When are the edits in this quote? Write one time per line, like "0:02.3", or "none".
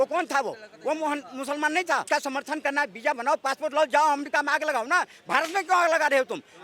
0:02.0